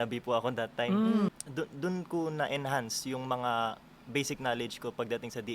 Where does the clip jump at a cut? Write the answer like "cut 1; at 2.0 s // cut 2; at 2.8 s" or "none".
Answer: cut 1; at 1.3 s